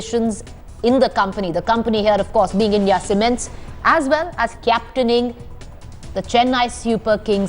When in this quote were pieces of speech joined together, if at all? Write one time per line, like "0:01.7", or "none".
0:02.3